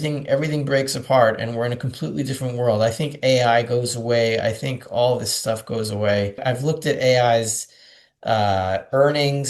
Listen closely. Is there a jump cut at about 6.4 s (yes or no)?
yes